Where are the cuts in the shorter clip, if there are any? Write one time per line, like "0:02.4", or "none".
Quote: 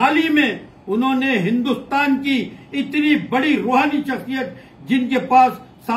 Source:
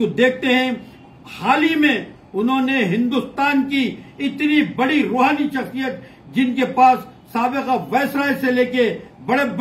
none